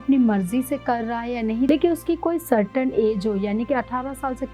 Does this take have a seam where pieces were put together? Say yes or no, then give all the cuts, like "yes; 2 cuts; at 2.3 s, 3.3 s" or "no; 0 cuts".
yes; 1 cut; at 1.7 s